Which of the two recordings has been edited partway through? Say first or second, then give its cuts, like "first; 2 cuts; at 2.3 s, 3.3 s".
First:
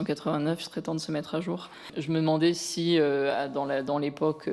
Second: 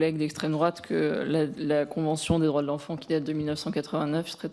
first; 1 cut; at 1.9 s